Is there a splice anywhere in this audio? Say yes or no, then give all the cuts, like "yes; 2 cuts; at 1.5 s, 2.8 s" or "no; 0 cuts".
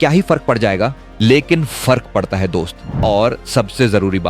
yes; 1 cut; at 2.8 s